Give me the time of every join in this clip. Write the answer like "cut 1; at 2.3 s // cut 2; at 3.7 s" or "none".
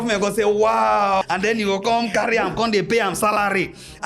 cut 1; at 1.2 s